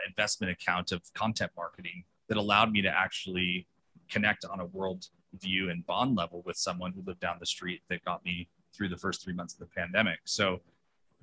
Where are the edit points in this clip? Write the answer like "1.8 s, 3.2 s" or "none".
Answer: none